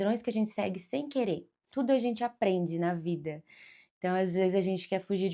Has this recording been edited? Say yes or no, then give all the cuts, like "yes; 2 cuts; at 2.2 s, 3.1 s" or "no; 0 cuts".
yes; 1 cut; at 1.7 s